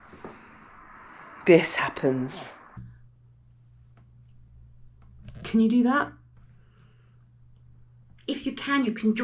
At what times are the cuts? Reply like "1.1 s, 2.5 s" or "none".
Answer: 2.8 s